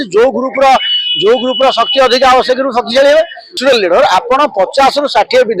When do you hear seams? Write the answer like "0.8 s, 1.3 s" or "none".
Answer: 3.6 s

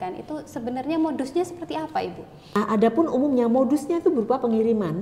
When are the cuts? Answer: 2.6 s

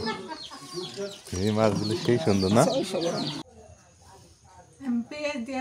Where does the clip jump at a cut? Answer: 3.4 s

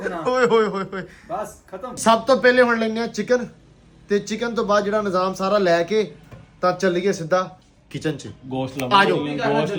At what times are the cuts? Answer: none

